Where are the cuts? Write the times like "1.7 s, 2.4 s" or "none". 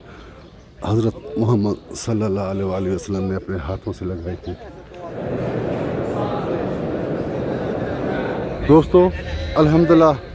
5.1 s, 8.5 s